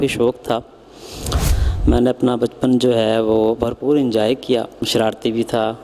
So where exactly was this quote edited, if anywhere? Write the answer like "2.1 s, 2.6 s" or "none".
1.4 s, 4.9 s